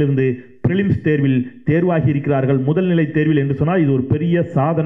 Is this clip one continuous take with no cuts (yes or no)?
yes